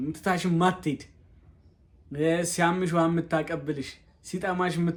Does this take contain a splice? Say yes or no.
no